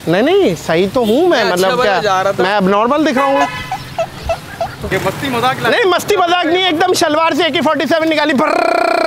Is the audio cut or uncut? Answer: cut